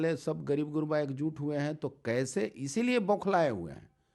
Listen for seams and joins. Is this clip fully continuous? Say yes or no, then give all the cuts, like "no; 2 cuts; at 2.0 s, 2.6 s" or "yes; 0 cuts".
yes; 0 cuts